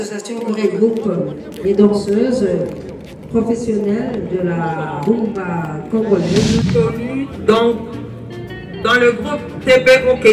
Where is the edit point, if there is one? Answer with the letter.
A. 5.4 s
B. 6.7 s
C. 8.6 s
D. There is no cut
B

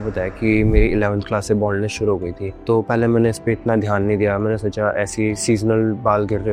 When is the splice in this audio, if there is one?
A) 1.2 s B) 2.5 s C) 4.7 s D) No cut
D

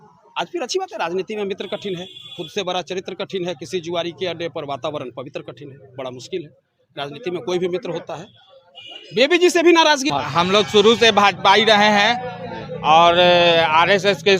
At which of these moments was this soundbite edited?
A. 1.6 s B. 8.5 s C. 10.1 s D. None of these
C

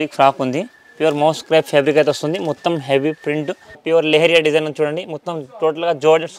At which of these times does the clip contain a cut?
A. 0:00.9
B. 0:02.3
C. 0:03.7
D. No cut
C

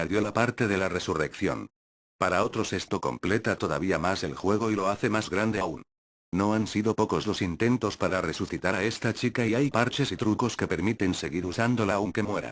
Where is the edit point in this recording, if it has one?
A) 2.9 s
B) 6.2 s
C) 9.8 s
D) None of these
C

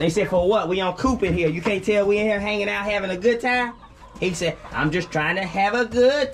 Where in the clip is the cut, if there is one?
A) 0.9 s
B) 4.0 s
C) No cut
C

